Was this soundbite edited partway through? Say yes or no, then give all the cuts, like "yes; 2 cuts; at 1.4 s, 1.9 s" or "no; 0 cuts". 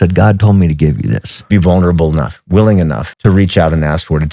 yes; 2 cuts; at 1.5 s, 3.1 s